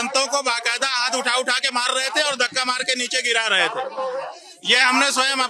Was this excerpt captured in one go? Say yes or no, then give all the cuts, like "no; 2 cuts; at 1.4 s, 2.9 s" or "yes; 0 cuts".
yes; 0 cuts